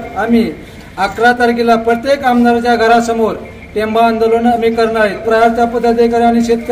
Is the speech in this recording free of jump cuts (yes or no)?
no